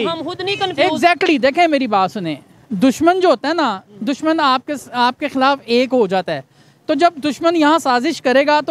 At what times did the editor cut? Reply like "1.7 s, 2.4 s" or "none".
none

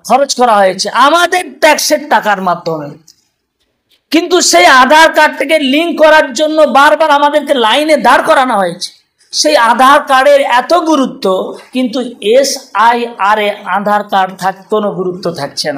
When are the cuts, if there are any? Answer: none

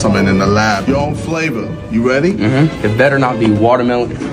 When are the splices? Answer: none

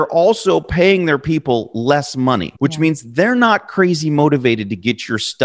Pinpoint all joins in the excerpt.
2.5 s

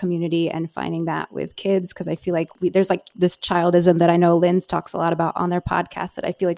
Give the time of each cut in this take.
2.5 s

